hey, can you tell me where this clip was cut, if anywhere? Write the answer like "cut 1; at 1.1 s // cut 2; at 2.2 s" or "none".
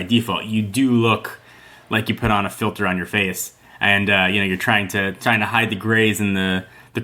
none